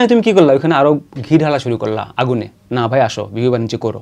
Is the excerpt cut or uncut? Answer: uncut